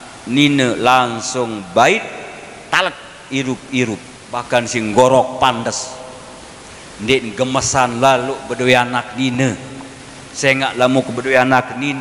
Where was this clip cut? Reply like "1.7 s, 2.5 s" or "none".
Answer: 4.4 s